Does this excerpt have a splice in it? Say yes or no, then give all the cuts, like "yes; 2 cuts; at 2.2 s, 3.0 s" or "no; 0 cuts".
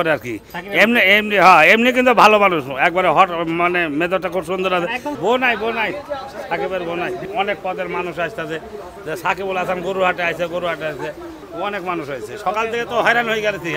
yes; 3 cuts; at 5.2 s, 7.3 s, 11.3 s